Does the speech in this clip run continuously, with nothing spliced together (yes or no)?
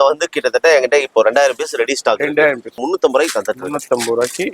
no